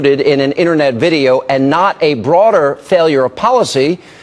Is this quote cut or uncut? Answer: uncut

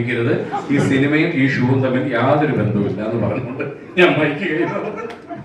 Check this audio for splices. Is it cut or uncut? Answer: uncut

